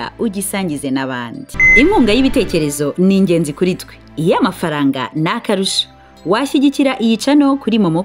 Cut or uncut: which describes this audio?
cut